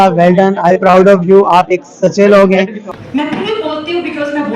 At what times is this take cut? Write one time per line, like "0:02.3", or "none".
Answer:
0:02.8